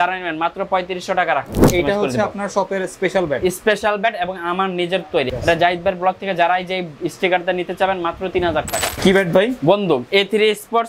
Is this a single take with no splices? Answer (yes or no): no